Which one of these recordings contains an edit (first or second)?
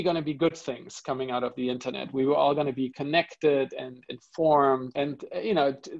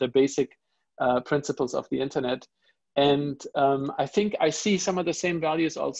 first